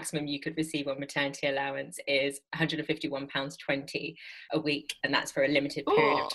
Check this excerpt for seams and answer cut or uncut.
cut